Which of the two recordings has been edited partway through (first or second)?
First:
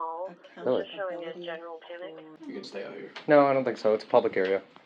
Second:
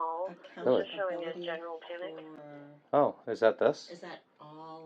first